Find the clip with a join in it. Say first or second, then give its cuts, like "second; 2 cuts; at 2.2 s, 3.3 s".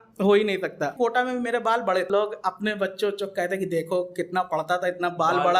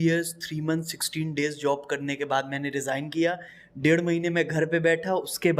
first; 2 cuts; at 0.9 s, 2.1 s